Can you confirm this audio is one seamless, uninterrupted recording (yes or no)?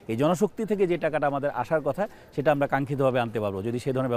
yes